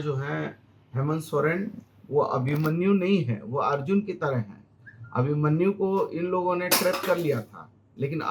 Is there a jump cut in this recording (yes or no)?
no